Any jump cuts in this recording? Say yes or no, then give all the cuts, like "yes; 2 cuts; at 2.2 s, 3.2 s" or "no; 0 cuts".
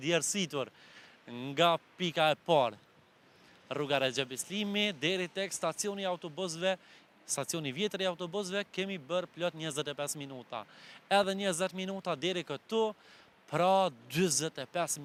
no; 0 cuts